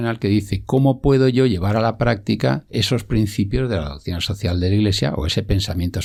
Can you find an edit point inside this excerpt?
no; 0 cuts

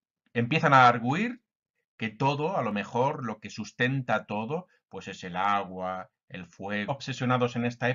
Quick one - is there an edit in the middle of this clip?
no; 0 cuts

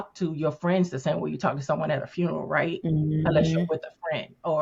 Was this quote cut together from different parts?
no; 0 cuts

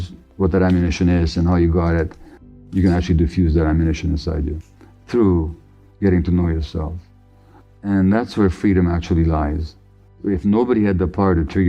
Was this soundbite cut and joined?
yes; 2 cuts; at 2.6 s, 10.2 s

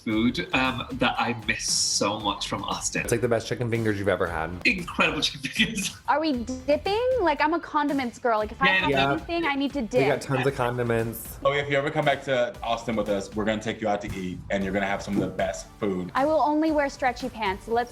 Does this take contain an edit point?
yes; 5 cuts; at 3.1 s, 4.5 s, 5.9 s, 11.4 s, 16.0 s

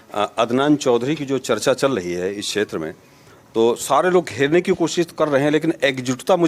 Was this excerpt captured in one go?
yes; 0 cuts

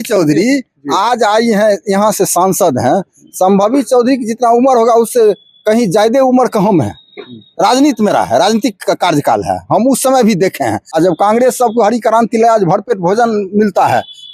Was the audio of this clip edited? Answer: yes; 1 cut; at 10.8 s

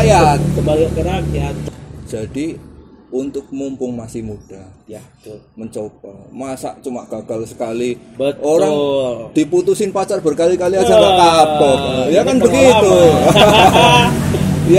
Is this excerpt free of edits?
no; 1 cut; at 1.6 s

